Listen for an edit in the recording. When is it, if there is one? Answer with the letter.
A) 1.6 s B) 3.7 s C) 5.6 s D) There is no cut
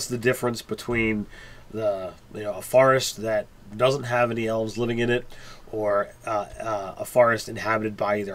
A